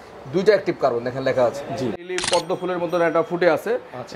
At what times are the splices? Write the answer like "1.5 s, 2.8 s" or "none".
2.0 s